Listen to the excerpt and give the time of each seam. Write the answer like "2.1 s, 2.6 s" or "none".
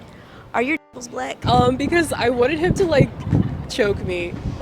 1.4 s